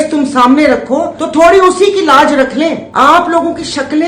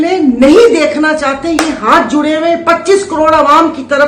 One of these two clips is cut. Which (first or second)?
first